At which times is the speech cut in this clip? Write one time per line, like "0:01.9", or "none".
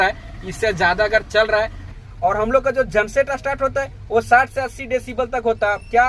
0:01.9